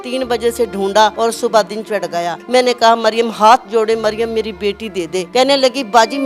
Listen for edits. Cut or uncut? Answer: cut